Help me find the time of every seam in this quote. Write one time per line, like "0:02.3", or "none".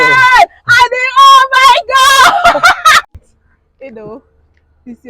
0:03.1